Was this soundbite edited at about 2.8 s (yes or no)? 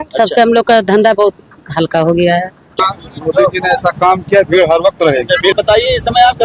yes